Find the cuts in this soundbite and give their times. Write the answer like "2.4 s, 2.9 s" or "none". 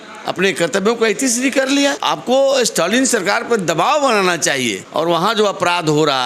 2.0 s, 4.8 s